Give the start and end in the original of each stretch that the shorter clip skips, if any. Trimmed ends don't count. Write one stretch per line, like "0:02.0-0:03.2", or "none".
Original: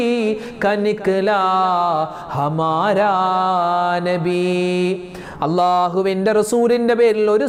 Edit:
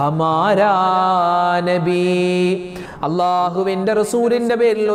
none